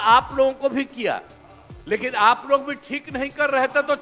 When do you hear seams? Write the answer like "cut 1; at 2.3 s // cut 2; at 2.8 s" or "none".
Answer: none